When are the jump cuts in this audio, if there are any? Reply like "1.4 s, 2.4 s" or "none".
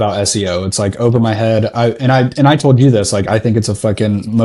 none